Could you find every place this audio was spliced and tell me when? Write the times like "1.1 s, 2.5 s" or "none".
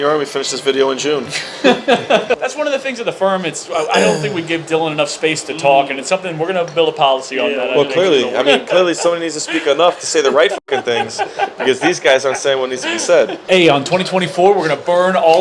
2.3 s, 13.4 s